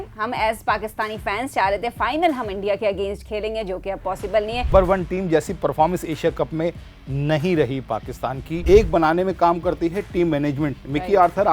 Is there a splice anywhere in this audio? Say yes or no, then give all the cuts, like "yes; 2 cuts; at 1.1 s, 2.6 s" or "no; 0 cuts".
yes; 2 cuts; at 4.7 s, 8.6 s